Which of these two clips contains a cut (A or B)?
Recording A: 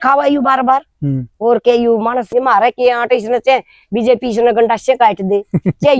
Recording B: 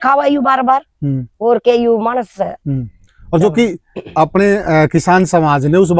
A